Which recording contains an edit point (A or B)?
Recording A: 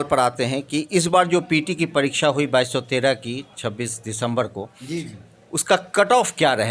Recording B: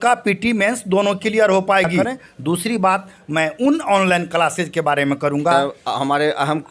B